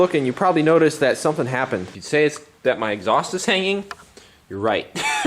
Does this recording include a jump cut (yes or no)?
yes